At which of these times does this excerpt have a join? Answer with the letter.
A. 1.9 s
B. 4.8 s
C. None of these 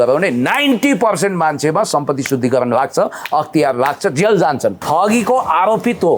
B